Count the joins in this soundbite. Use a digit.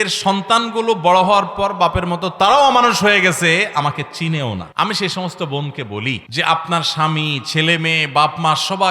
2